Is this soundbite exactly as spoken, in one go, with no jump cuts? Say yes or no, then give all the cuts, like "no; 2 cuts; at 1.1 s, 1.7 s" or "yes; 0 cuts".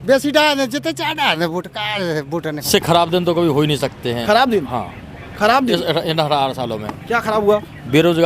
no; 1 cut; at 2.7 s